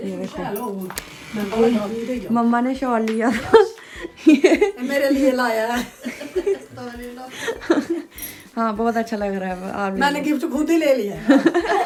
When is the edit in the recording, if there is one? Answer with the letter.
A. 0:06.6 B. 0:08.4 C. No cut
C